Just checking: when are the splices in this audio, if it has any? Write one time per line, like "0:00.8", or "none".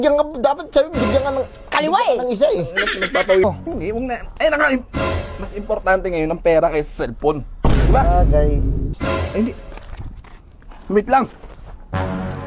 0:03.4
0:08.9